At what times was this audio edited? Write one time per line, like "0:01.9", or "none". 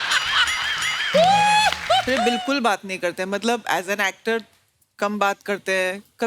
0:02.1